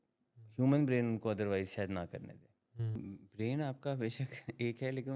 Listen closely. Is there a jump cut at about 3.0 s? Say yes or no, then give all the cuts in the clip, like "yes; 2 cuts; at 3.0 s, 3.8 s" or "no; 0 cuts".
yes; 1 cut; at 3.0 s